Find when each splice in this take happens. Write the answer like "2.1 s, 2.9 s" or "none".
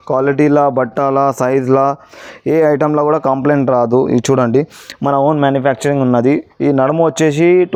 none

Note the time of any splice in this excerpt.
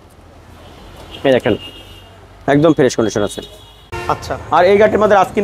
3.9 s

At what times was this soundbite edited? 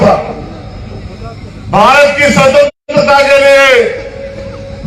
none

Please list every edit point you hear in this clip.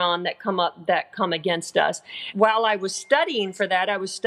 2.2 s

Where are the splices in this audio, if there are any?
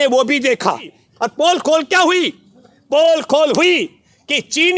1.0 s

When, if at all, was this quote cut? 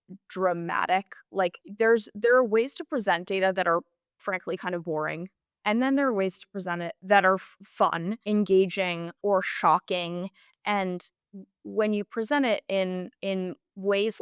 1.8 s, 6.9 s, 8.1 s, 9.1 s, 13.1 s

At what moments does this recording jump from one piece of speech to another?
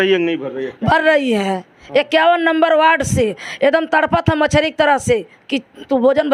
none

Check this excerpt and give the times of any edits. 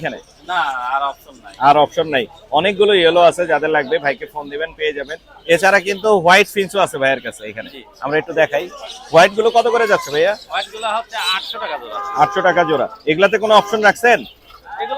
none

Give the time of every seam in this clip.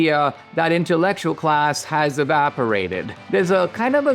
3.2 s

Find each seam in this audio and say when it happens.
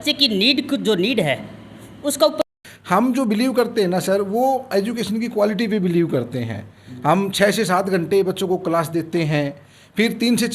2.4 s

